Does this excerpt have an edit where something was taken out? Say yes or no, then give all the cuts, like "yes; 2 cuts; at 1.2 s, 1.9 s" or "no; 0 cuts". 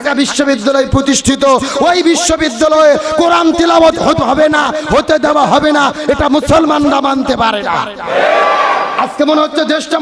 no; 0 cuts